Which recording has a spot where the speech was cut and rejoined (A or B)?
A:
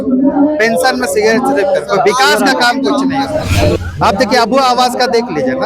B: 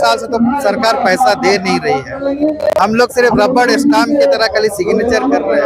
A